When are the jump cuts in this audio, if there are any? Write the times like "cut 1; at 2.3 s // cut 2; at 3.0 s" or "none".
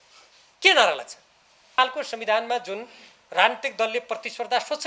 cut 1; at 1.8 s